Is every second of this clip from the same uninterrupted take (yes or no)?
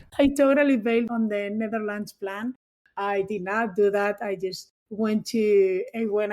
no